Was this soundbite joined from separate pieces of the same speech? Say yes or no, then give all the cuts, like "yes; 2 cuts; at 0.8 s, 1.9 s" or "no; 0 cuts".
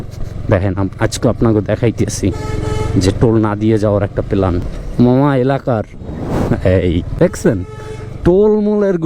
yes; 2 cuts; at 4.7 s, 7.1 s